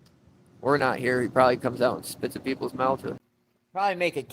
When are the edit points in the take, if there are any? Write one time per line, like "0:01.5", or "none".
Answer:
0:03.1

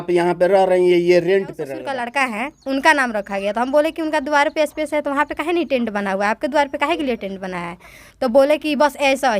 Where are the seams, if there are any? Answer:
0:01.7

